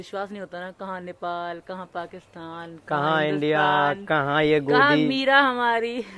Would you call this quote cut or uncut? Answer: uncut